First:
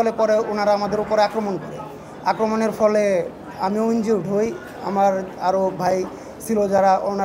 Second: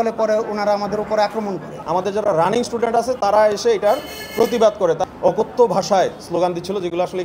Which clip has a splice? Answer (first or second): second